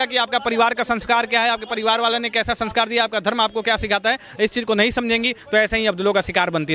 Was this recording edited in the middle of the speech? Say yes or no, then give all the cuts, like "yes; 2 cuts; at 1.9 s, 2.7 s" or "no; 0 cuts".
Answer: no; 0 cuts